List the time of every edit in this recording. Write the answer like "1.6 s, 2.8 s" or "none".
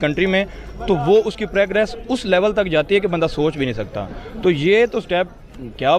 none

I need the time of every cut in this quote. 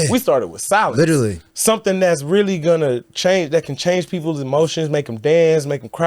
1.5 s

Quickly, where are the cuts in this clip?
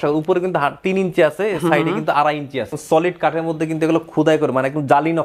2.7 s

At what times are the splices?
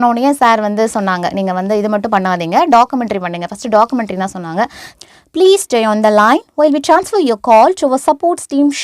4.8 s

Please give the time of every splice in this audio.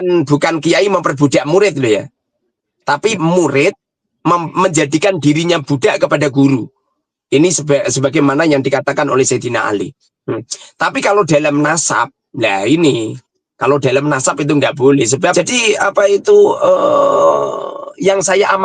15.3 s

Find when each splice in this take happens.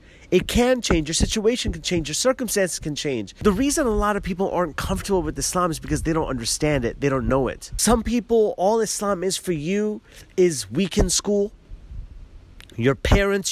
3.3 s, 7.7 s

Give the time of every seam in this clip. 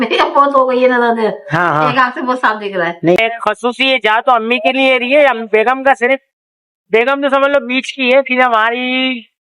3.2 s

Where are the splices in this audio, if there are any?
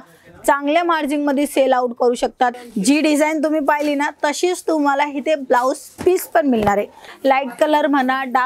2.5 s, 7.0 s

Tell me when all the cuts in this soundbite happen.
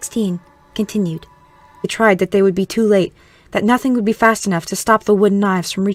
none

